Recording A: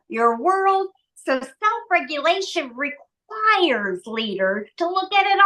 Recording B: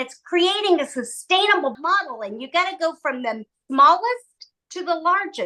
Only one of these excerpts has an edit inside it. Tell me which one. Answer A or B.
B